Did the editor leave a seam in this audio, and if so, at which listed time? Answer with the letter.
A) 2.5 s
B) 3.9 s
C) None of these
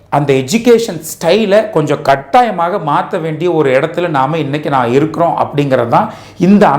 C